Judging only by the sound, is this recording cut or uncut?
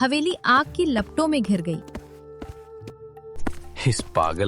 cut